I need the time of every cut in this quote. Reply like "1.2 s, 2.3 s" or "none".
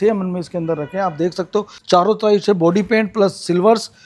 1.8 s